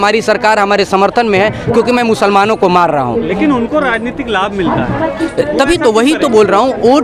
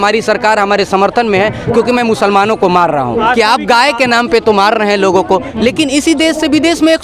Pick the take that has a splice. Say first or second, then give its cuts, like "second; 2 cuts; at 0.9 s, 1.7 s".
second; 1 cut; at 3.2 s